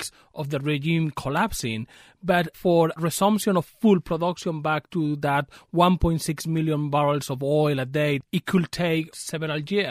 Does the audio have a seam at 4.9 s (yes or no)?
no